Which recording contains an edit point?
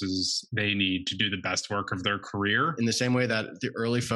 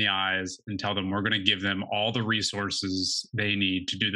first; 1 cut; at 2.7 s

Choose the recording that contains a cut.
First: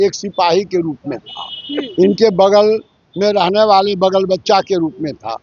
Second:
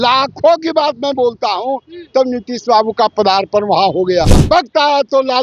second; 1 cut; at 4.4 s

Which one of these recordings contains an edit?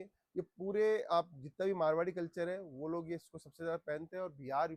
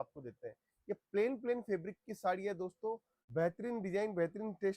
second; 1 cut; at 3.1 s

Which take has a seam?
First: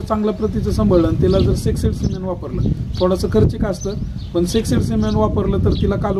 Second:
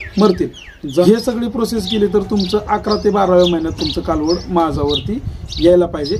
second; 1 cut; at 1.0 s

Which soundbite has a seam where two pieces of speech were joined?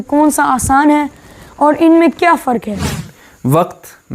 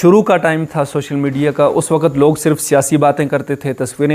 first; 1 cut; at 3.2 s

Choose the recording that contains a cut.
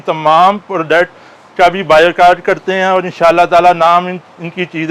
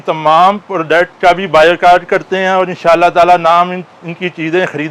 second; 1 cut; at 1.1 s

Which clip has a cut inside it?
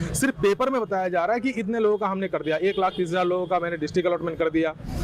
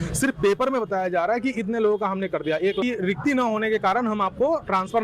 second; 1 cut; at 2.8 s

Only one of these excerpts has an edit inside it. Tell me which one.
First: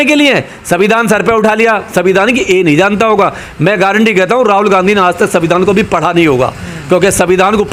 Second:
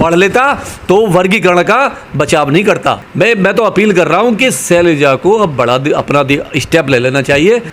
second; 1 cut; at 3.0 s

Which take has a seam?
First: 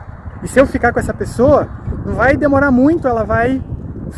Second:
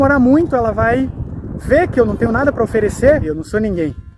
second; 1 cut; at 3.2 s

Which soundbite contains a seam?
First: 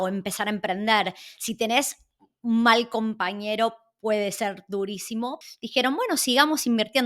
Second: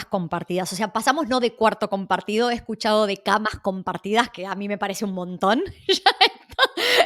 first; 1 cut; at 5.4 s

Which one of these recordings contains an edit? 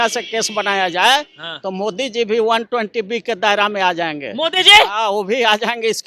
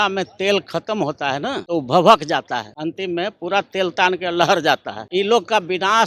second; 3 cuts; at 1.6 s, 2.7 s, 4.9 s

